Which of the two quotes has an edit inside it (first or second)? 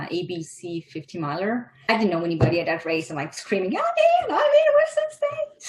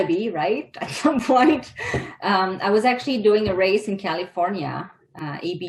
first